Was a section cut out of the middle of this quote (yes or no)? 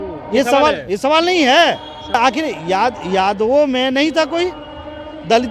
yes